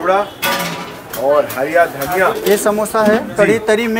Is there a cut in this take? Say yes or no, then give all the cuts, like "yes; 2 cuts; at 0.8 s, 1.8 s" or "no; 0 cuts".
yes; 1 cut; at 2.3 s